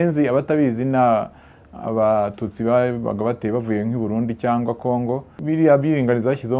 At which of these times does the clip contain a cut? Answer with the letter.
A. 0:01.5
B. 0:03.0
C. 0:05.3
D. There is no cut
C